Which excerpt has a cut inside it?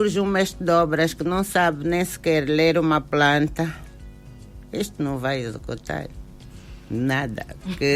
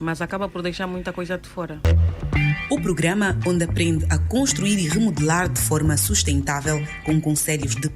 second; 1 cut; at 1.8 s

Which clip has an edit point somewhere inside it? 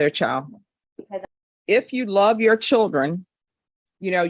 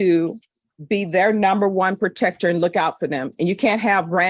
first; 1 cut; at 1.1 s

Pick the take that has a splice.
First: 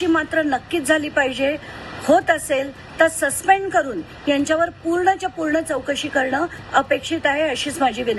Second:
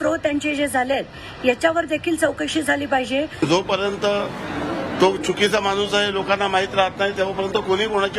second; 1 cut; at 3.4 s

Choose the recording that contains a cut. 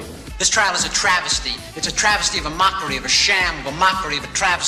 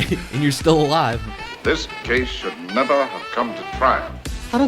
second; 1 cut; at 1.5 s

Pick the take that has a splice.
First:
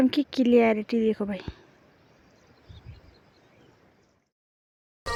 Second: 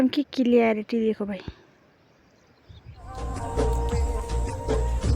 second; 1 cut; at 3.2 s

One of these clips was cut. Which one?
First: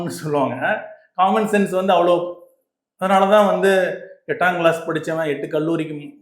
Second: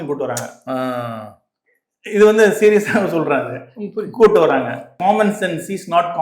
second; 1 cut; at 4.9 s

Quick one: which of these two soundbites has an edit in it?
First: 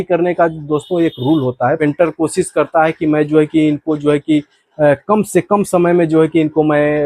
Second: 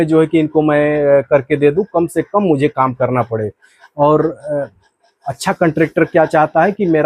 first; 1 cut; at 1.8 s

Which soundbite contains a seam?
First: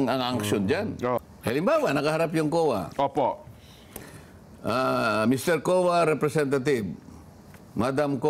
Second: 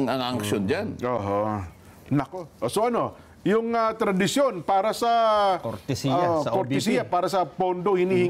first; 1 cut; at 1.2 s

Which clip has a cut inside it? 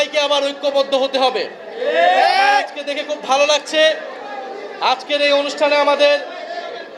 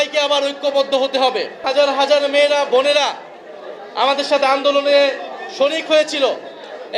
second; 1 cut; at 1.6 s

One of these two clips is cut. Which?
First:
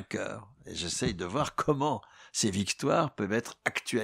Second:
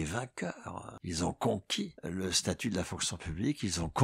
second; 2 cuts; at 0.9 s, 2.0 s

